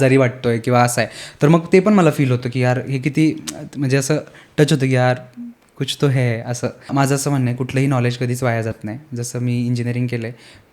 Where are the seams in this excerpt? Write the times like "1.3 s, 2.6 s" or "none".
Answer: 6.9 s